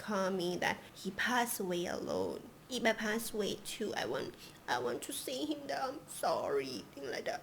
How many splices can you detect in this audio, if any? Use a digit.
2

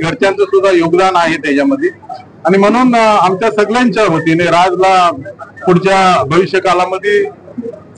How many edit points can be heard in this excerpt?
0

